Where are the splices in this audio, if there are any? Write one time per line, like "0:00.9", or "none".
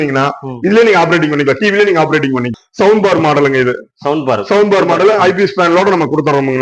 0:02.5